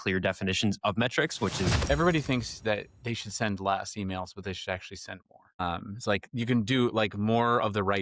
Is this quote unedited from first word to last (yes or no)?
no